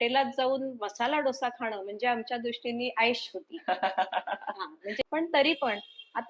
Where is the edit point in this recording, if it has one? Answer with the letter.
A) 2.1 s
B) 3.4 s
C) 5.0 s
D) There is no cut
C